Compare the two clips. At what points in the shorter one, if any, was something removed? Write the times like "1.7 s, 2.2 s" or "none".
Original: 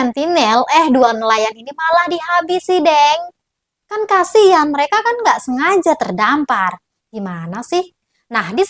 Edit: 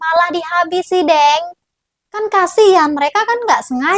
none